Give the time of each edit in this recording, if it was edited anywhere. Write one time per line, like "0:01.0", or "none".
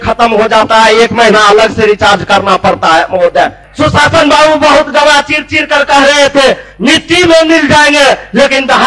0:03.6

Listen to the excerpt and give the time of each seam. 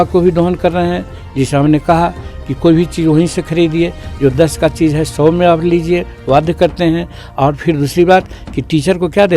none

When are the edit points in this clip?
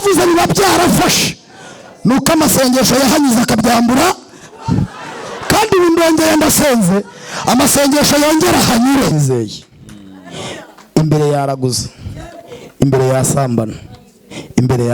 0:09.1

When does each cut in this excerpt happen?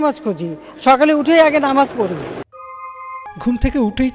0:03.3

